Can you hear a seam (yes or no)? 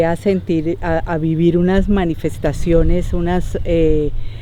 no